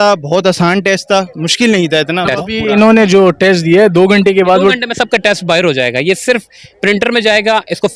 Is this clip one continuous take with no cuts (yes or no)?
no